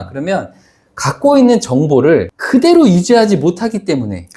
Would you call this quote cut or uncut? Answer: uncut